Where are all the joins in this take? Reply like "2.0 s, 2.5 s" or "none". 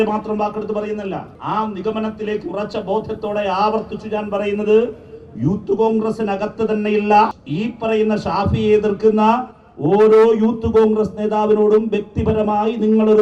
1.3 s, 7.4 s